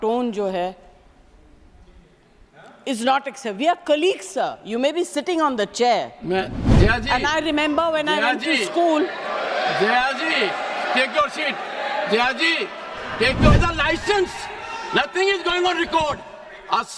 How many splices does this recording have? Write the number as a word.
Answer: one